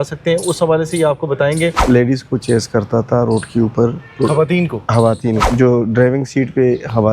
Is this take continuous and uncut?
no; 2 cuts; at 1.8 s, 5.4 s

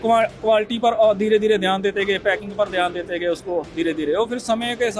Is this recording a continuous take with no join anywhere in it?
yes; 0 cuts

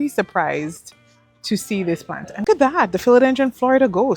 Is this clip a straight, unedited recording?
no; 1 cut; at 2.5 s

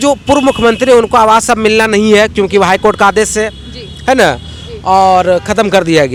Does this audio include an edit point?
no; 0 cuts

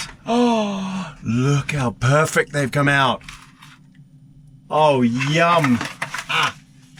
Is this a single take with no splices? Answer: yes; 0 cuts

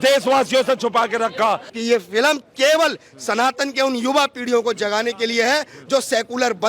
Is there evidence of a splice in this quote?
yes; 1 cut; at 1.7 s

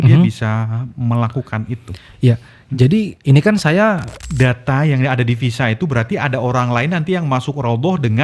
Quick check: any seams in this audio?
yes; 1 cut; at 4.1 s

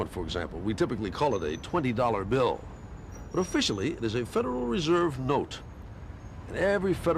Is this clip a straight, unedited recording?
no; 1 cut; at 1.1 s

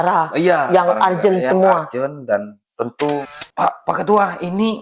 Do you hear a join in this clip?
yes; 1 cut; at 3.3 s

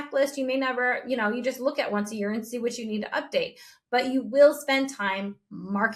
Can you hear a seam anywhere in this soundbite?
no; 0 cuts

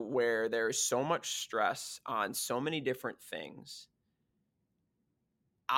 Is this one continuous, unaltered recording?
yes; 0 cuts

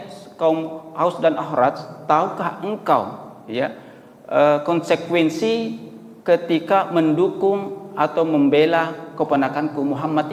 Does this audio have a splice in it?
no; 0 cuts

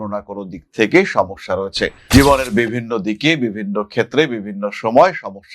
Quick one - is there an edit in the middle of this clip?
yes; 1 cut; at 1.9 s

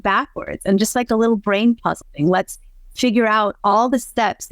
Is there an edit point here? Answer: yes; 1 cut; at 2.0 s

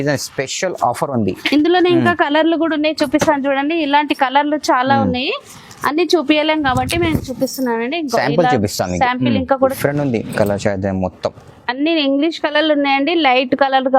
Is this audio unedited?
no; 1 cut; at 9.6 s

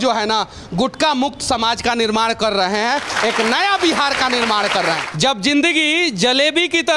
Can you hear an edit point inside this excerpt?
yes; 1 cut; at 5.1 s

